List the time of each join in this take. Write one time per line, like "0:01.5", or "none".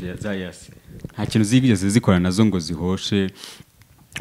none